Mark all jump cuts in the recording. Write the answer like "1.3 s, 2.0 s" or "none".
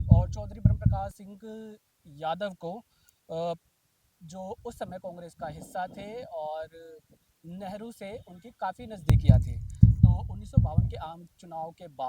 0.9 s, 9.0 s, 10.9 s